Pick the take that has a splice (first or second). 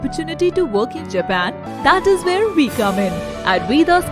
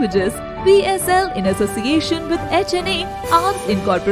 first